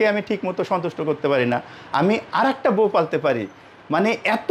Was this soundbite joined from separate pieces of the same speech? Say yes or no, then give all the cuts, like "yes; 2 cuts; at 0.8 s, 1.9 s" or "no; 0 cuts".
no; 0 cuts